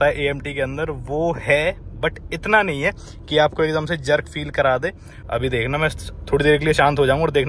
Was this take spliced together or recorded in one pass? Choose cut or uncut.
cut